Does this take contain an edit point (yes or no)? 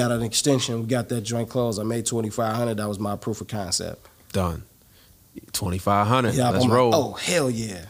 no